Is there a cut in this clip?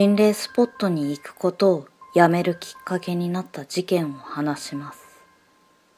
no; 0 cuts

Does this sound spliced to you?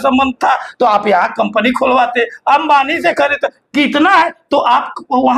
no; 0 cuts

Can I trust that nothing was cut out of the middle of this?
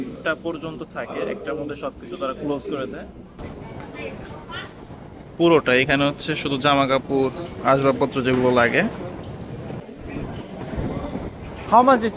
no; 2 cuts; at 3.4 s, 9.9 s

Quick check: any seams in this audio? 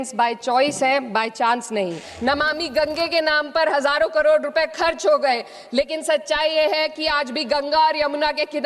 yes; 1 cut; at 2.1 s

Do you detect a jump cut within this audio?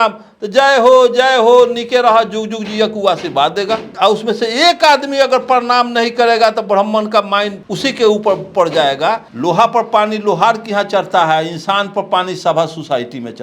yes; 3 cuts; at 3.9 s, 7.6 s, 9.3 s

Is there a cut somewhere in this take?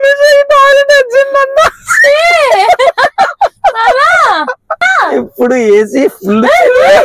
yes; 1 cut; at 4.9 s

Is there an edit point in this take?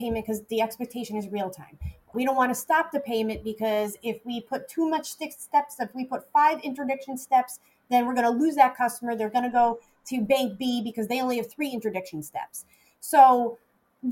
yes; 1 cut; at 2.1 s

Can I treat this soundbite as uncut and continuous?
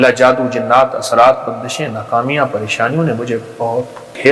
yes; 0 cuts

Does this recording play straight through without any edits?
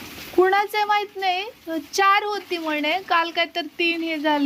yes; 0 cuts

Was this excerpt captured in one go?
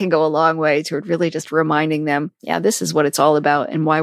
yes; 0 cuts

